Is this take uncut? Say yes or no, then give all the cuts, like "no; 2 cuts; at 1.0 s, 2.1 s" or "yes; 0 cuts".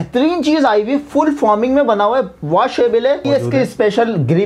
no; 1 cut; at 3.2 s